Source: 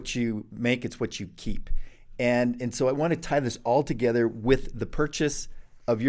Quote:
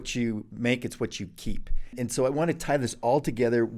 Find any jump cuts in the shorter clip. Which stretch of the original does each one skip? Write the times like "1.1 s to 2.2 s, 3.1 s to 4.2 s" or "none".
1.9 s to 2.6 s